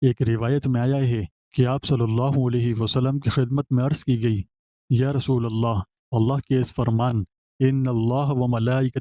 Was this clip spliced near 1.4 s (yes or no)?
yes